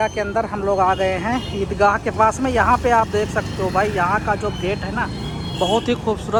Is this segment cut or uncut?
uncut